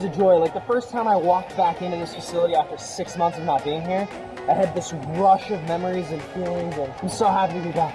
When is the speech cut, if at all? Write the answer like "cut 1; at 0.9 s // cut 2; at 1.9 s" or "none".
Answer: cut 1; at 6.9 s